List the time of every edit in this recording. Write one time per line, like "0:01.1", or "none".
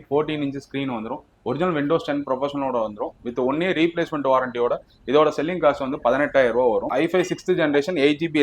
0:06.9